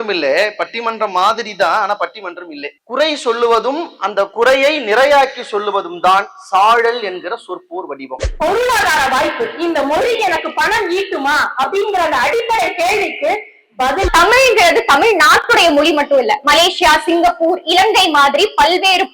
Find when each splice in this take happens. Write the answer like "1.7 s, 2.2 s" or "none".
2.8 s, 8.3 s, 14.1 s